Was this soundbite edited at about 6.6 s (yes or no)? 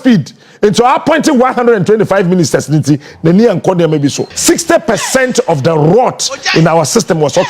no